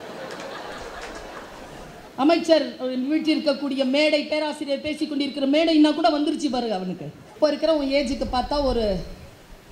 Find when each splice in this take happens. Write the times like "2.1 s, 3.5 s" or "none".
2.0 s, 7.3 s